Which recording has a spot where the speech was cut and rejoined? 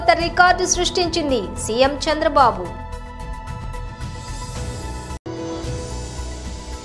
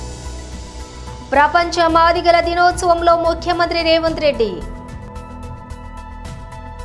second; 2 cuts; at 0.9 s, 5.1 s

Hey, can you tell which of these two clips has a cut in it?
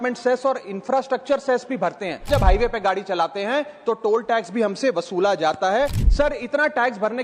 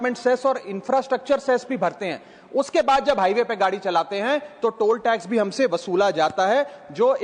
first; 2 cuts; at 2.3 s, 6.0 s

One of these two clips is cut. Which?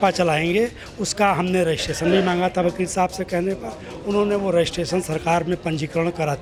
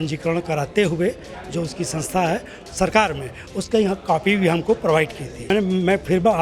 second; 1 cut; at 5.5 s

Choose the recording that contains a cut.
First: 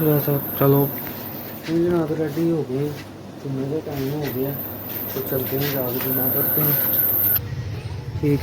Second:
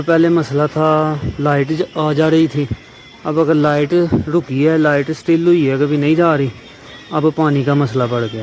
first; 1 cut; at 7.4 s

